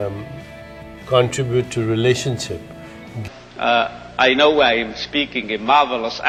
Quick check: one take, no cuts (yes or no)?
yes